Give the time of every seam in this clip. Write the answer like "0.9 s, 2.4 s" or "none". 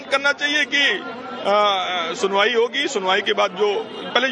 2.5 s